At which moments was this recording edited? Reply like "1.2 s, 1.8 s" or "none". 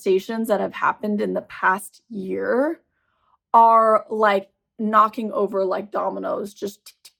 none